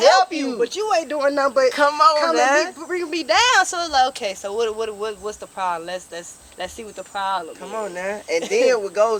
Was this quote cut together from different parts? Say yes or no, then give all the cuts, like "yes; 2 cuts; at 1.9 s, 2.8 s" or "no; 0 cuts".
no; 0 cuts